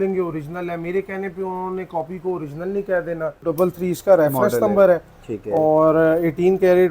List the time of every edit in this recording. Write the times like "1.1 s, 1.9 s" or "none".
3.5 s